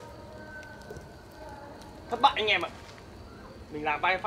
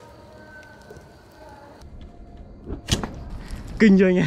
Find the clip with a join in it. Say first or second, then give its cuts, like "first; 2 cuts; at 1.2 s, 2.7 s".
second; 1 cut; at 1.8 s